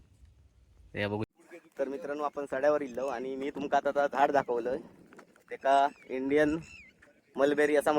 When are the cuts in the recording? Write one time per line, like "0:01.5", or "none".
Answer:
0:01.3